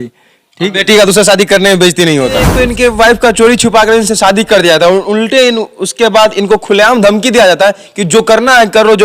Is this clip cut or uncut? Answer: cut